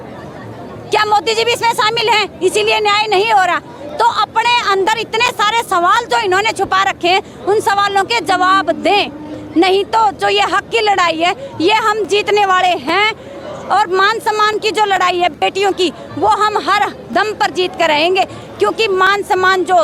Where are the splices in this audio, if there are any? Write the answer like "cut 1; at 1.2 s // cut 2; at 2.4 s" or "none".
none